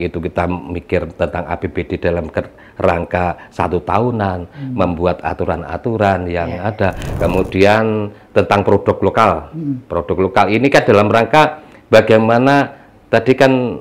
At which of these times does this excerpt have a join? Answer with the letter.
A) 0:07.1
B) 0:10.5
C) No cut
A